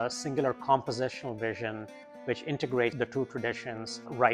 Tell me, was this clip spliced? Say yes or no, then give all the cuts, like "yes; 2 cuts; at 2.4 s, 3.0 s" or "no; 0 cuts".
no; 0 cuts